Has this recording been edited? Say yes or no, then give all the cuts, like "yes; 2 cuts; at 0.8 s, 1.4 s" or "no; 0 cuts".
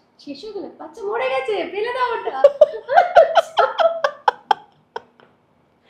no; 0 cuts